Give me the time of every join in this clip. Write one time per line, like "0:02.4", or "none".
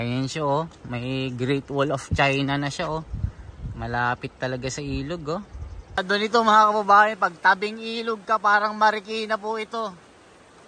0:06.0